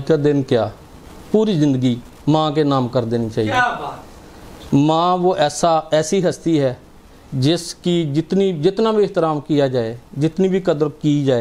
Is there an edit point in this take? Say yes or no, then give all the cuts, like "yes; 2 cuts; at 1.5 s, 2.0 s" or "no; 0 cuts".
no; 0 cuts